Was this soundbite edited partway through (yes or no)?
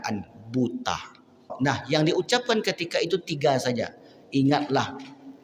yes